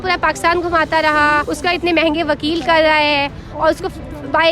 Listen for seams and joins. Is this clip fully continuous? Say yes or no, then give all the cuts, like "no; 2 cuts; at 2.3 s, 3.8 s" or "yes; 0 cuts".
no; 1 cut; at 1.5 s